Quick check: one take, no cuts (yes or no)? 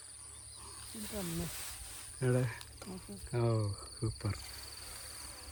yes